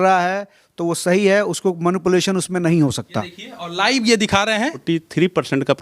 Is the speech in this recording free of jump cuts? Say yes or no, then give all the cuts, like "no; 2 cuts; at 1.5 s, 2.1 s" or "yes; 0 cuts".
no; 2 cuts; at 3.4 s, 4.8 s